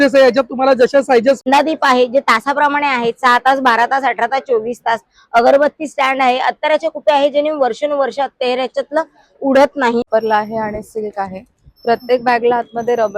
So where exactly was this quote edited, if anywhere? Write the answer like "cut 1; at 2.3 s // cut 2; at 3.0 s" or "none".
cut 1; at 1.4 s // cut 2; at 10.1 s